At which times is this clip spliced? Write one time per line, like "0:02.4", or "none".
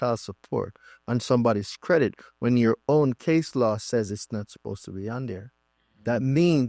none

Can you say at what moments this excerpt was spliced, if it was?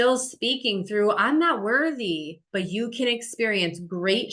0:02.4

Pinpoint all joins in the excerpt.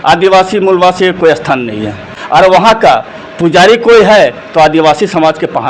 0:02.2

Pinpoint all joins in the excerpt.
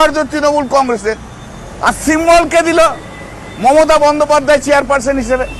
none

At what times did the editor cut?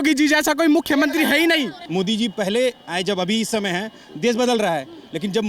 0:01.8

